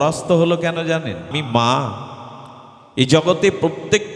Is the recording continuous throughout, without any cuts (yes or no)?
no